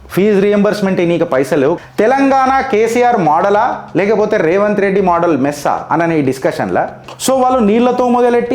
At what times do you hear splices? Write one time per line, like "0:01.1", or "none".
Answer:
0:01.8
0:07.0